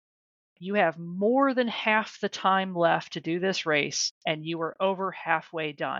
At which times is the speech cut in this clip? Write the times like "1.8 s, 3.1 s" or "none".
none